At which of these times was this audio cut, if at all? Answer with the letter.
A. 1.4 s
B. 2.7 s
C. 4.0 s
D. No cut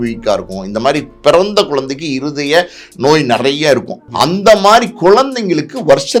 C